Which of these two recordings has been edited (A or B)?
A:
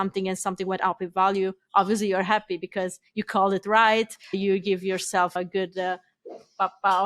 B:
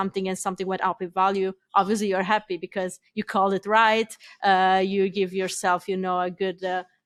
A